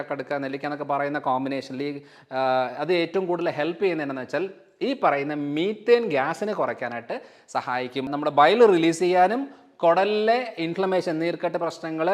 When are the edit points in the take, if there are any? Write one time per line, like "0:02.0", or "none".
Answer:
0:08.1